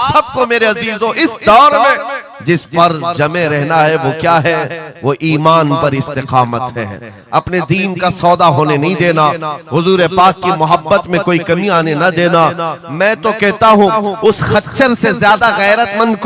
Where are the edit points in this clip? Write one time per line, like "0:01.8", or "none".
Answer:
none